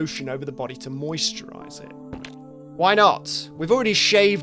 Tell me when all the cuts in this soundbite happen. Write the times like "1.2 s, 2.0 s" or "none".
1.9 s